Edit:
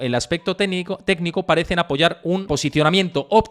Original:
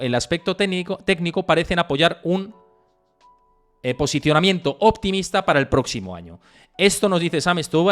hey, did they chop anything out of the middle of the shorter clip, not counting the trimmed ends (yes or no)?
yes